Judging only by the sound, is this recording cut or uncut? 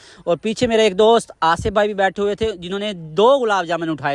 uncut